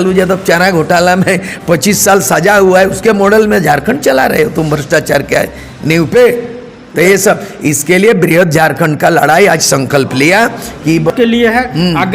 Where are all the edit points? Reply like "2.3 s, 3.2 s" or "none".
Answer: 11.1 s